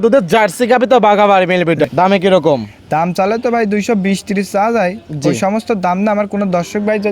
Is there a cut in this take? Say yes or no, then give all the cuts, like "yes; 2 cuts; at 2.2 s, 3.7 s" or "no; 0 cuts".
yes; 1 cut; at 1.9 s